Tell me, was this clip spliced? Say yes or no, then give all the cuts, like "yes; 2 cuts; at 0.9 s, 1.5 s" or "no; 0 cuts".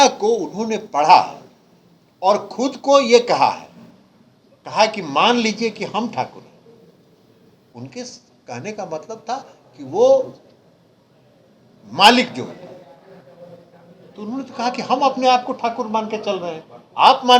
yes; 1 cut; at 7.6 s